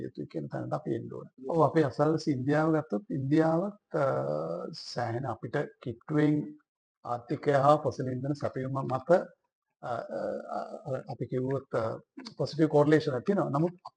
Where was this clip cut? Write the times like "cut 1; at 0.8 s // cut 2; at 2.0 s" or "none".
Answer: cut 1; at 1.4 s

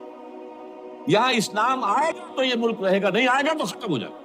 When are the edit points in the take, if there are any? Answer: none

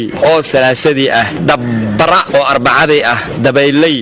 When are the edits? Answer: none

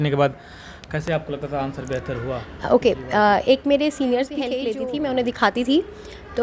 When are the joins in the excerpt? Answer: cut 1; at 4.5 s

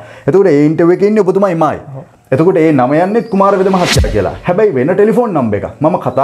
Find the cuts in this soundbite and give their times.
none

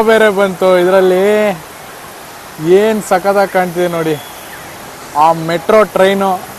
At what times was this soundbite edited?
none

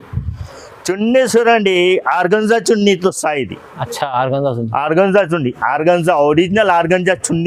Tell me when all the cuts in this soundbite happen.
none

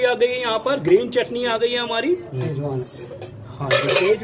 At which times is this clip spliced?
cut 1; at 2.5 s

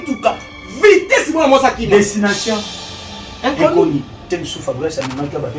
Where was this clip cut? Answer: cut 1; at 4.3 s

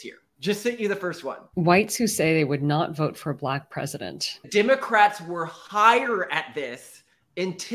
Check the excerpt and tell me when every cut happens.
cut 1; at 1.4 s // cut 2; at 4.5 s

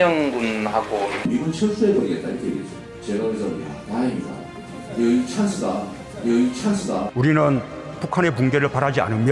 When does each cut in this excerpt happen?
cut 1; at 1.1 s

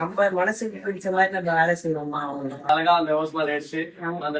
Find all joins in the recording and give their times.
cut 1; at 2.7 s

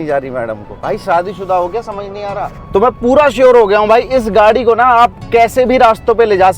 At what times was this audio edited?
cut 1; at 2.5 s

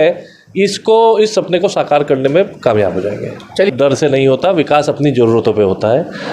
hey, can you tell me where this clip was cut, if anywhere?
cut 1; at 3.7 s

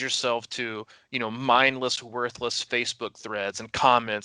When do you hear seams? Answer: none

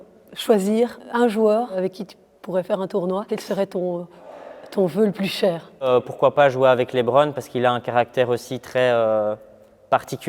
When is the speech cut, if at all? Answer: cut 1; at 1.0 s // cut 2; at 1.7 s // cut 3; at 3.3 s // cut 4; at 5.9 s

